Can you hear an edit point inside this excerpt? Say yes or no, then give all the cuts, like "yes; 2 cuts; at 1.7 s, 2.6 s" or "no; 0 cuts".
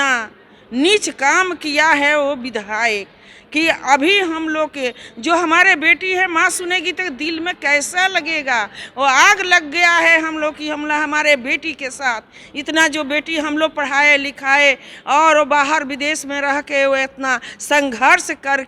no; 0 cuts